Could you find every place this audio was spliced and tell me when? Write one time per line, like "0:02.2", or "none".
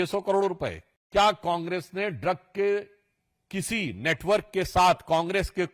0:01.0